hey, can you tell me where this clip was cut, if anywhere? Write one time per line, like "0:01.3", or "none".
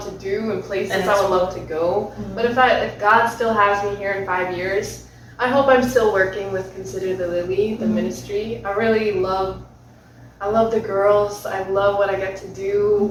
none

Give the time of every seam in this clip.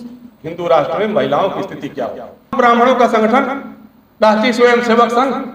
0:02.5

